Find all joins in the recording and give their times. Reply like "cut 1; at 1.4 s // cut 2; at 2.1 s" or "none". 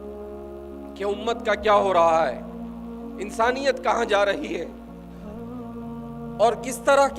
cut 1; at 4.7 s // cut 2; at 6.1 s